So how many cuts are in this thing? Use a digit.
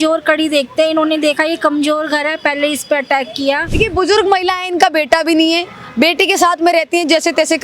1